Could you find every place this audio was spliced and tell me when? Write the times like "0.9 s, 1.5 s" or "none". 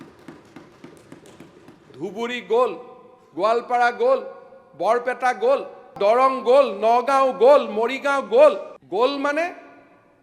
5.9 s, 8.7 s